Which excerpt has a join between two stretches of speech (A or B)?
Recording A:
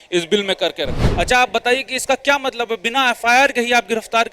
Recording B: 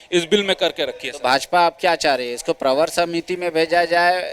A